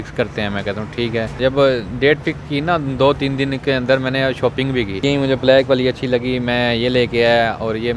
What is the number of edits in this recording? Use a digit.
2